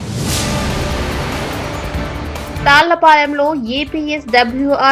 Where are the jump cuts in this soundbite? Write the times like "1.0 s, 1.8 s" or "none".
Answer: 2.6 s